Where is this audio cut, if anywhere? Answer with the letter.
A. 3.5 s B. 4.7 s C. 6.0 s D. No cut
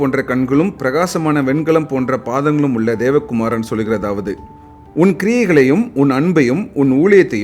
B